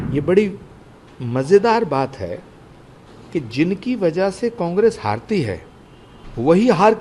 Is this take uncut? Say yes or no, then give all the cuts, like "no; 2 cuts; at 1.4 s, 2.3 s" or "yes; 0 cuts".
yes; 0 cuts